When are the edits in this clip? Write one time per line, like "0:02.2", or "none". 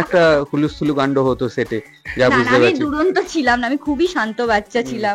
none